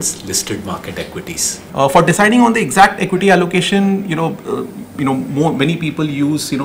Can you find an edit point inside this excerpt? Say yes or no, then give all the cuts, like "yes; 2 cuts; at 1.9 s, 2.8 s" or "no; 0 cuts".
yes; 1 cut; at 1.5 s